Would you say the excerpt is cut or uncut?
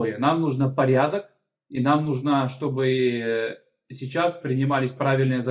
uncut